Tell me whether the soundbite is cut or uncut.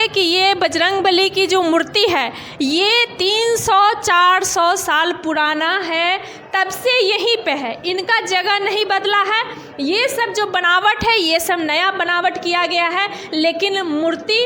uncut